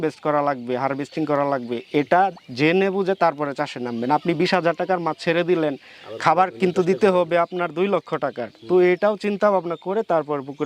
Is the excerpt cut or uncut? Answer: uncut